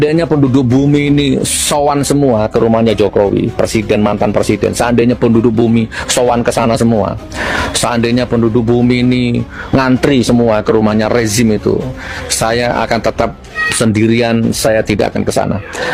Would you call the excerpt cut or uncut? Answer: uncut